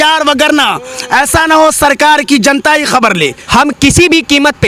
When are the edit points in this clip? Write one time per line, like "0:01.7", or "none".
0:03.4